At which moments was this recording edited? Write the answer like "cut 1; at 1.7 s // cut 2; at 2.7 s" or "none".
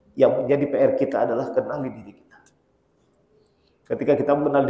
none